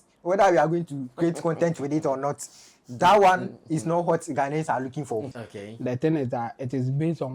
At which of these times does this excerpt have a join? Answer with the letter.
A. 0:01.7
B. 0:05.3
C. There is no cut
B